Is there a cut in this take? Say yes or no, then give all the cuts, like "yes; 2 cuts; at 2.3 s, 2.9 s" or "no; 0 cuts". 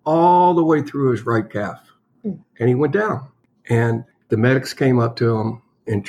yes; 1 cut; at 4.3 s